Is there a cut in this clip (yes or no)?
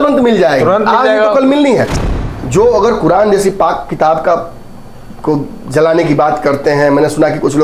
yes